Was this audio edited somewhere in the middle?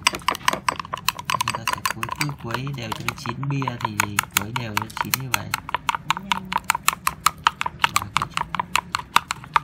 no; 0 cuts

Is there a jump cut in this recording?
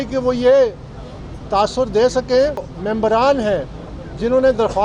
yes; 1 cut; at 2.7 s

